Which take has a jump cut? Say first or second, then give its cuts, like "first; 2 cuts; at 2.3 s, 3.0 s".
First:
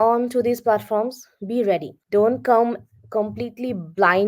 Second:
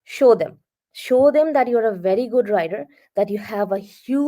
first; 1 cut; at 1.9 s